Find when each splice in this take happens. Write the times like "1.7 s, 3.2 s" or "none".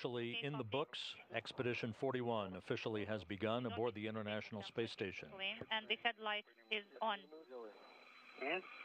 2.6 s